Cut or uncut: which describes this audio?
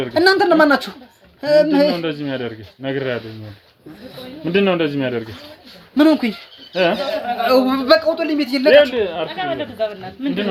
uncut